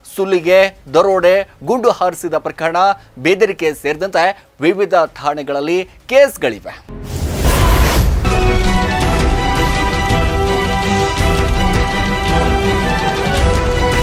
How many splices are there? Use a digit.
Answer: 0